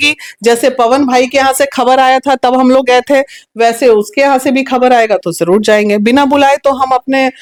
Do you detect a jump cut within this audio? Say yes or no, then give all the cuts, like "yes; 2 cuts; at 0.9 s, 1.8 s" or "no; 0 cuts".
no; 0 cuts